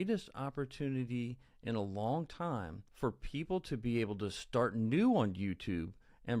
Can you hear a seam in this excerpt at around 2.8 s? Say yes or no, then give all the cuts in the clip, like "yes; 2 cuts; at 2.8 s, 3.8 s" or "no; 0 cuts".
yes; 1 cut; at 2.8 s